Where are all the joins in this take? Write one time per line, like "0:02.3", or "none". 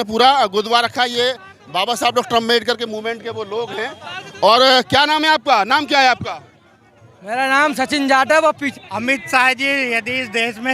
0:08.7